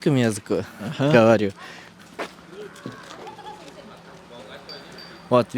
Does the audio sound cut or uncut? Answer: uncut